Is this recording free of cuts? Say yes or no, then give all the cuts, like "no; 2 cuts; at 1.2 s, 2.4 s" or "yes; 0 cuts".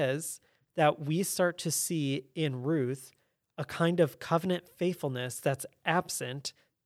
yes; 0 cuts